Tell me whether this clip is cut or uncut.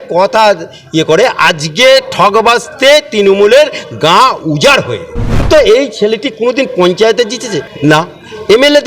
cut